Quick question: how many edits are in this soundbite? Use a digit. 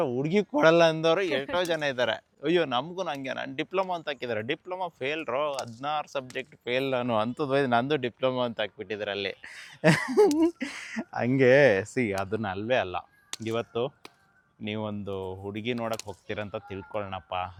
0